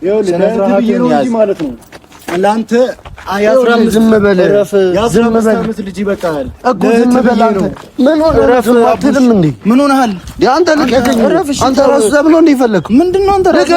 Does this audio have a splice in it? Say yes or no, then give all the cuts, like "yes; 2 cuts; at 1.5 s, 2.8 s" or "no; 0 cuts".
no; 0 cuts